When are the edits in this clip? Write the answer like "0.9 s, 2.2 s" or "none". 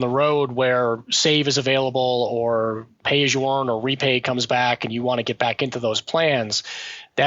2.9 s